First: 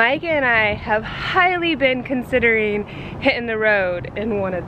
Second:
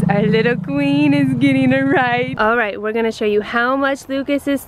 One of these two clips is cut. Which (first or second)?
second